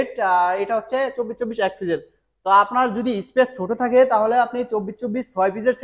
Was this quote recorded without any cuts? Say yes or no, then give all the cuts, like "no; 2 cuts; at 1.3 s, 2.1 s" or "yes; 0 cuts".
yes; 0 cuts